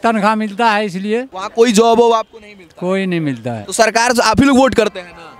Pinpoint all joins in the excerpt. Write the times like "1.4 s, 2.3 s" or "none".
1.4 s, 3.5 s